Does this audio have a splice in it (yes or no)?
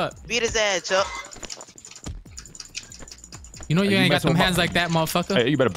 no